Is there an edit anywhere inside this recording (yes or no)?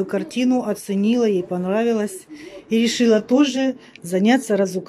no